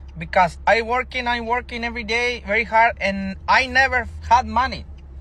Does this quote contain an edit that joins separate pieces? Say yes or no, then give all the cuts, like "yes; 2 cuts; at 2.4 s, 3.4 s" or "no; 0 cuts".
no; 0 cuts